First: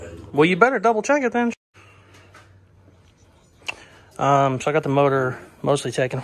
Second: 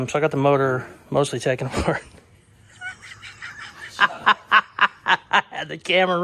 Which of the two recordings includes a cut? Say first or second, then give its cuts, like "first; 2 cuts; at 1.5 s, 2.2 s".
first; 1 cut; at 1.5 s